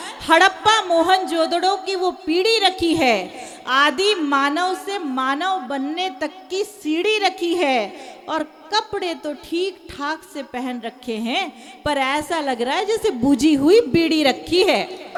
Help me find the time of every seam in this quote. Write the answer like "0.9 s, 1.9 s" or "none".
none